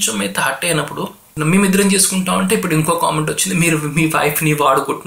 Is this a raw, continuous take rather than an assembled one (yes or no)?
no